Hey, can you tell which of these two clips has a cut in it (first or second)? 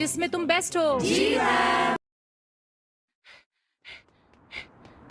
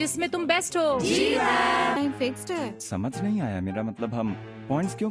second